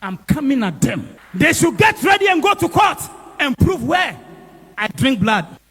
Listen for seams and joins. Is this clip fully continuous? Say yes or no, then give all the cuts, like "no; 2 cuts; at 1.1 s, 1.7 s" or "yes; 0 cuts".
yes; 0 cuts